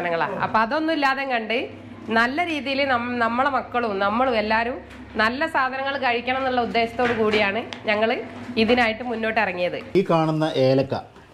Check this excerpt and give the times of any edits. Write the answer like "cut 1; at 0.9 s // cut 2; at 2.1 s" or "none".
cut 1; at 9.9 s